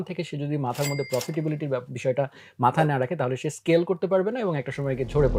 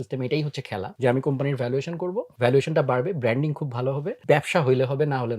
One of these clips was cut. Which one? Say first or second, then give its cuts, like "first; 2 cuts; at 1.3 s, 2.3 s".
second; 3 cuts; at 0.9 s, 2.3 s, 4.2 s